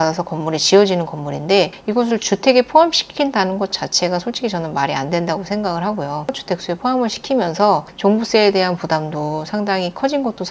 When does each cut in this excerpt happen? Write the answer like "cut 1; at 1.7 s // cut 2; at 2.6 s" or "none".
cut 1; at 6.4 s